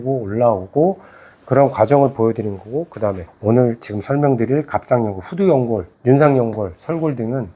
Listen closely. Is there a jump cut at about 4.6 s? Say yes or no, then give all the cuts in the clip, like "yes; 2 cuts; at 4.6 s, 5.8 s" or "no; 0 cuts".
no; 2 cuts; at 3.3 s, 5.9 s